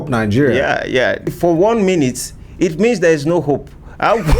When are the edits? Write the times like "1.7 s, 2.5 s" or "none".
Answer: 1.3 s